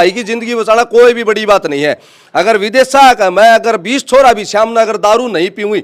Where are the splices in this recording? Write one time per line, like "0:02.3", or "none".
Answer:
none